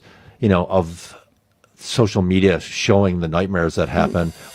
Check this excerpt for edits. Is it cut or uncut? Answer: uncut